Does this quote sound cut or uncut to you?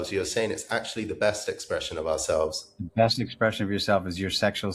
uncut